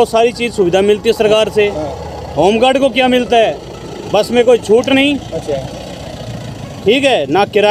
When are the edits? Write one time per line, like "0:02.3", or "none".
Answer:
none

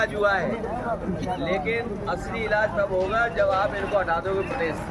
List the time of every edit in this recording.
none

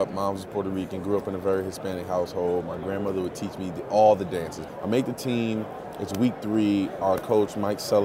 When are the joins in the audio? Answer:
0:04.6

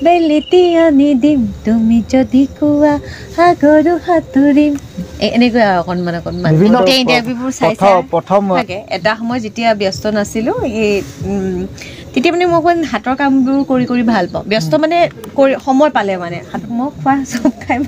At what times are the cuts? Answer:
0:06.8
0:08.6
0:16.5

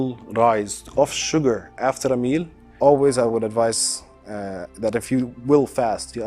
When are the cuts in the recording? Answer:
0:02.7

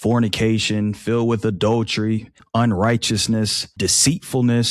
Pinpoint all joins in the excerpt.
0:02.4
0:03.6

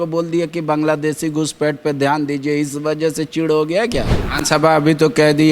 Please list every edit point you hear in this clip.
0:04.2

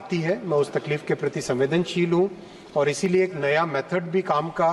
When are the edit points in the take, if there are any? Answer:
none

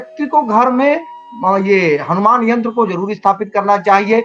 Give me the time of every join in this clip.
none

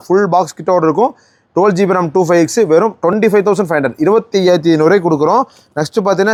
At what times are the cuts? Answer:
none

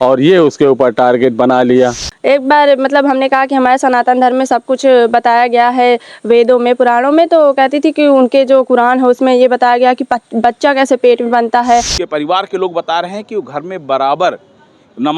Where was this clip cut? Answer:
0:02.1
0:12.0

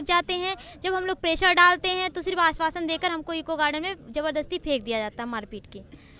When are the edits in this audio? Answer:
none

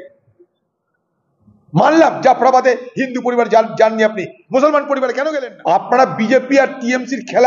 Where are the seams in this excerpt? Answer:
0:05.2

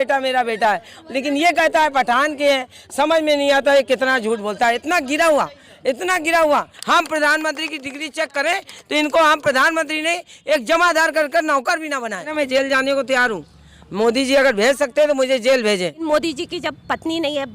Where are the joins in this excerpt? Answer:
0:06.8
0:12.3
0:16.0

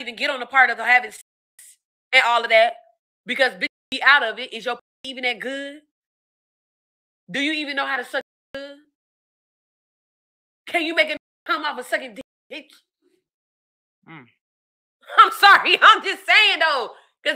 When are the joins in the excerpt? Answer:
none

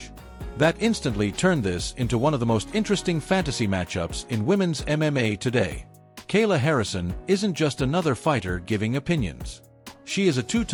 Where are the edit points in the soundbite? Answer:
none

